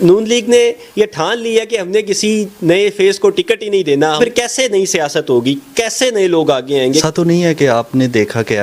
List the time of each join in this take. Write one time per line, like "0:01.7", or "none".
0:04.2
0:06.9

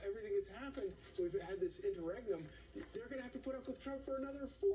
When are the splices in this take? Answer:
none

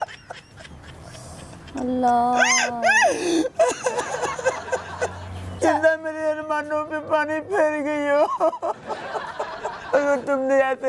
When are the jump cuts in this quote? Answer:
none

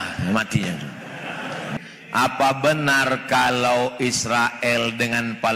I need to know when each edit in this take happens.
0:01.7

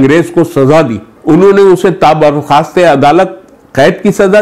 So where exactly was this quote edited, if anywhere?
0:01.1

